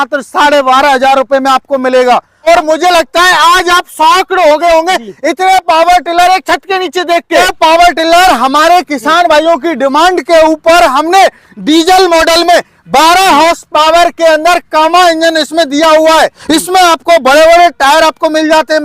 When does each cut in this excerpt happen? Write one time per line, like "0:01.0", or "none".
0:02.5
0:07.4
0:16.4